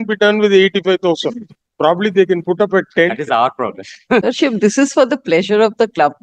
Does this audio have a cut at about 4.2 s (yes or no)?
yes